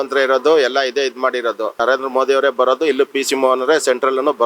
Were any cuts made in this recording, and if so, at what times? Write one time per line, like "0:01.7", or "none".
0:01.8